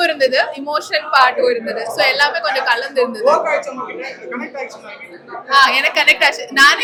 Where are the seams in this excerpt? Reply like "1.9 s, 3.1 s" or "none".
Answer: none